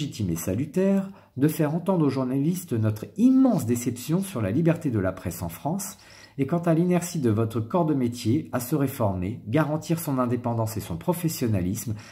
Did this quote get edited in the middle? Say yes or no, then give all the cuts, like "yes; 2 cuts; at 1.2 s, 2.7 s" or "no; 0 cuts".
no; 0 cuts